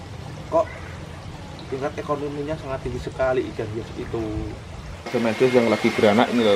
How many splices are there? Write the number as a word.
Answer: one